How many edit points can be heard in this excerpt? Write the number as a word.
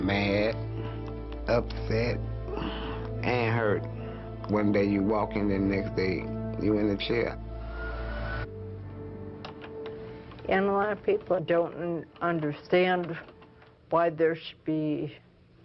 zero